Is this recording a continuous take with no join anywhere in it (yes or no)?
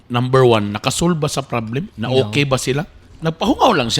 no